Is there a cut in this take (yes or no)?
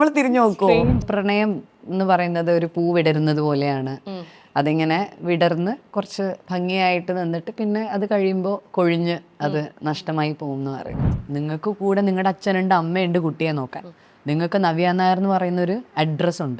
yes